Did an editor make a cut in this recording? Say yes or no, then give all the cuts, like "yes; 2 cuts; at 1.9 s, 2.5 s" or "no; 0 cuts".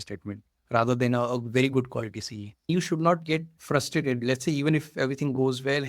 yes; 2 cuts; at 2.7 s, 3.5 s